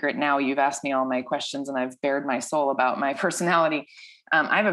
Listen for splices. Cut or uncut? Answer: uncut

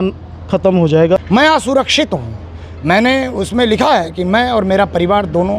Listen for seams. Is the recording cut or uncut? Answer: cut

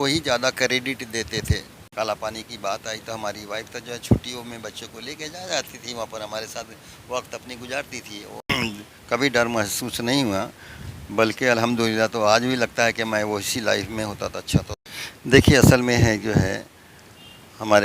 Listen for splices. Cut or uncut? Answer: cut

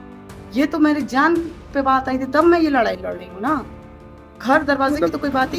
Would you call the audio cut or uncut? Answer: uncut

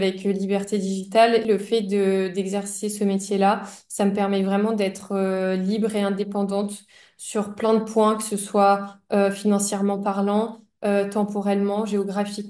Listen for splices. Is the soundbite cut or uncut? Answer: cut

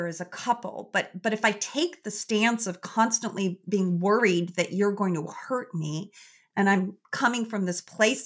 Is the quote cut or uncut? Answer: uncut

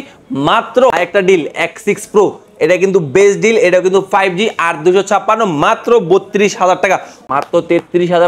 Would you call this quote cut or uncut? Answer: cut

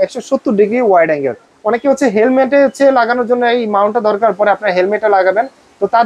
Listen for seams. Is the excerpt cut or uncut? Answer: cut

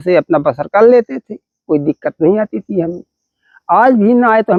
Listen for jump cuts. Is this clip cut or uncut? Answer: uncut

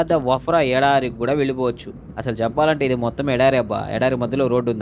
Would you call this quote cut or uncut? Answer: cut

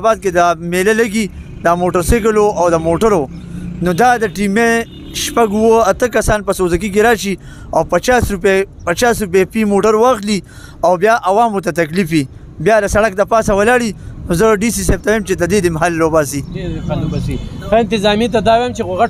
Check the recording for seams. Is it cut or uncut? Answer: uncut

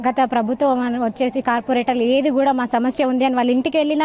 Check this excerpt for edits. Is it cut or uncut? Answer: uncut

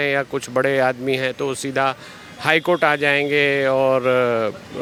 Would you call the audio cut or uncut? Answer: uncut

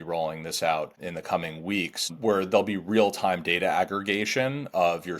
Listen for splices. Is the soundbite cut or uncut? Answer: cut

